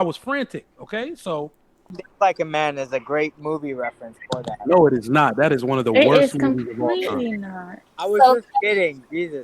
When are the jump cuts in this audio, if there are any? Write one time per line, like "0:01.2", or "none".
0:02.0